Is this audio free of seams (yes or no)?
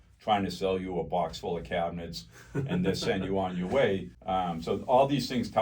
no